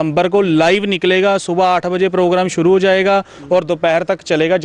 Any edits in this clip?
no; 0 cuts

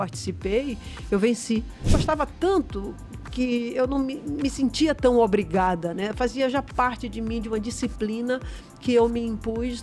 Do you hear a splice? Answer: yes; 1 cut; at 2.0 s

